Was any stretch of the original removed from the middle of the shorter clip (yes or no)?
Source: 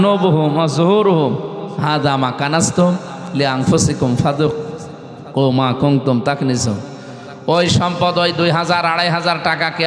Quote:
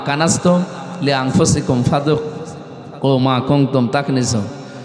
no